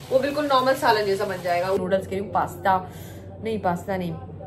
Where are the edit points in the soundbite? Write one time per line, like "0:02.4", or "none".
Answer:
0:01.8